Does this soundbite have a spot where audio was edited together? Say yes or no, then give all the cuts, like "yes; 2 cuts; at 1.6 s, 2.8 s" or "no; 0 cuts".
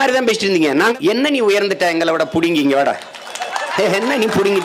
yes; 1 cut; at 0.9 s